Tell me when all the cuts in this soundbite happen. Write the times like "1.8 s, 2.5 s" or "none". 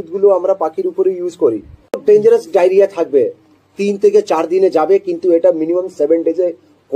2.0 s